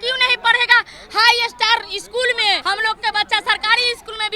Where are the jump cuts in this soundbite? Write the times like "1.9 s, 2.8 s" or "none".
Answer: 2.6 s